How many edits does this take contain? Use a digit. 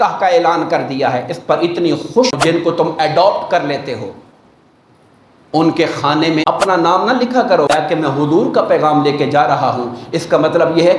3